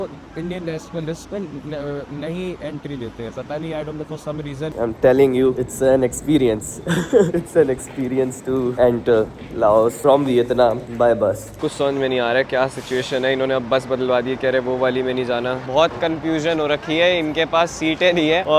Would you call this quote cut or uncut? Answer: cut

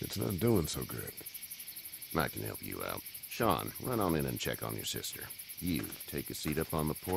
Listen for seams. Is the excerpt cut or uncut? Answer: uncut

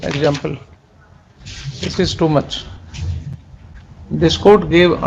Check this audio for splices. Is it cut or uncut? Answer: cut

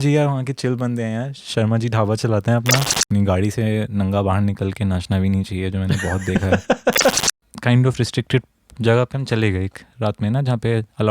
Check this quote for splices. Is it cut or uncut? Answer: cut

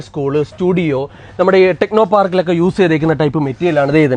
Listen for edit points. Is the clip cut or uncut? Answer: uncut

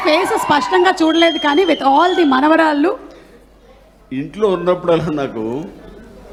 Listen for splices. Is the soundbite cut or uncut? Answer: uncut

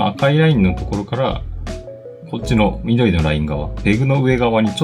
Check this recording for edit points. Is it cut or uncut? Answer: cut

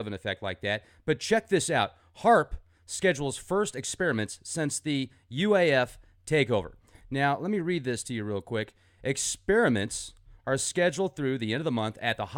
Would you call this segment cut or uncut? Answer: cut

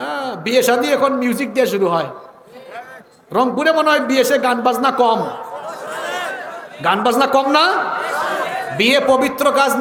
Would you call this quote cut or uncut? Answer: uncut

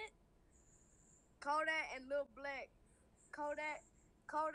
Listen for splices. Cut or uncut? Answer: uncut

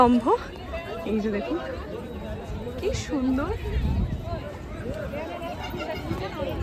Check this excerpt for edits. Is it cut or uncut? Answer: uncut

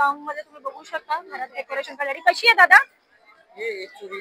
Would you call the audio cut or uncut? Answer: uncut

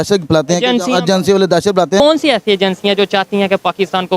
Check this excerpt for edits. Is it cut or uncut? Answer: cut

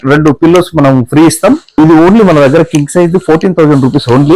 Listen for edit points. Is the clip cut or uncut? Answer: cut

